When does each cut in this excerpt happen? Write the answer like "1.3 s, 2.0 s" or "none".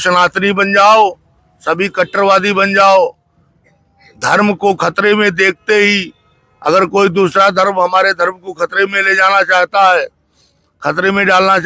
none